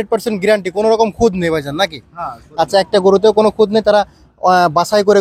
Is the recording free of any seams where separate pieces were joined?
yes; 0 cuts

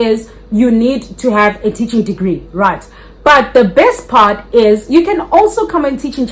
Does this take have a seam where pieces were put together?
no; 0 cuts

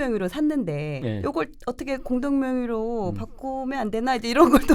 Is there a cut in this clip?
yes; 1 cut; at 1.0 s

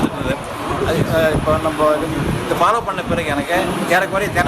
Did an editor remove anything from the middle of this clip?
yes; 1 cut; at 2.2 s

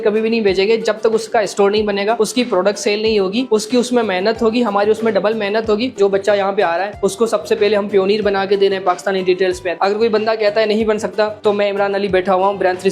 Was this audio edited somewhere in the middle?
yes; 2 cuts; at 6.0 s, 9.7 s

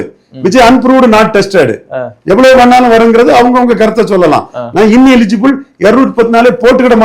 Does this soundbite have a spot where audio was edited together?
no; 0 cuts

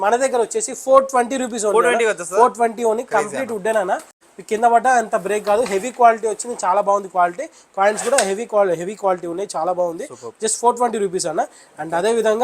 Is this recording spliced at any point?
no; 0 cuts

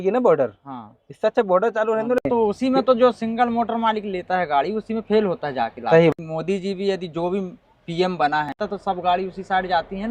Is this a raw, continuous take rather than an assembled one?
no; 3 cuts; at 2.3 s, 6.1 s, 8.6 s

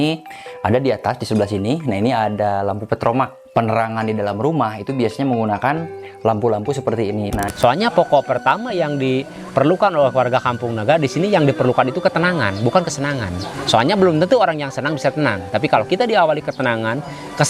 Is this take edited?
yes; 1 cut; at 7.5 s

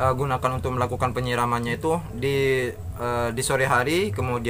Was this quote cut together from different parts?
no; 0 cuts

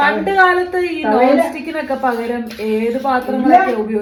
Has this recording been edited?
no; 0 cuts

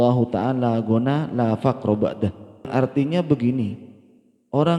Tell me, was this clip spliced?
yes; 1 cut; at 2.7 s

